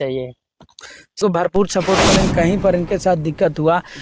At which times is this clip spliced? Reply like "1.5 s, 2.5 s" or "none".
1.2 s